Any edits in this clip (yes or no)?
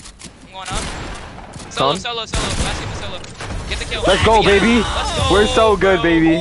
no